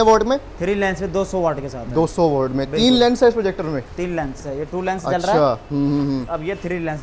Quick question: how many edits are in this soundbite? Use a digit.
1